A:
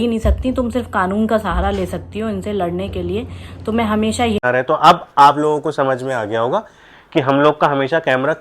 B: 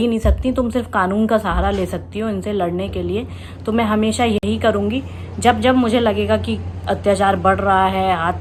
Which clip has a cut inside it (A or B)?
A